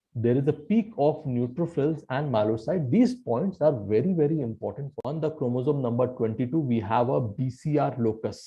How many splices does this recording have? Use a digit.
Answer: 1